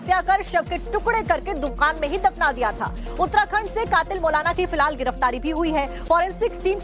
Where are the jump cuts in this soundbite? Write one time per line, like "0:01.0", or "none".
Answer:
0:01.9

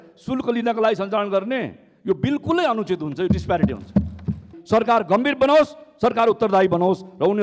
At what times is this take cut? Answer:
0:04.5

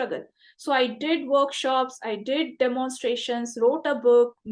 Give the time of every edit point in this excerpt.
none

